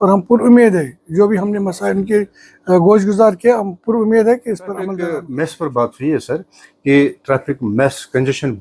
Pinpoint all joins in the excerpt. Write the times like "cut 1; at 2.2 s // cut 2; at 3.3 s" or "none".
cut 1; at 5.1 s